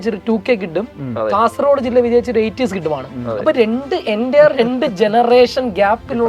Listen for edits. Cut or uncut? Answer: uncut